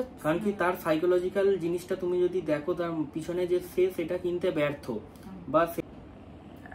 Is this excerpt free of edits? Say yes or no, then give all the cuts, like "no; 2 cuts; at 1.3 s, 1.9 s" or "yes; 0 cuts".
no; 1 cut; at 5.8 s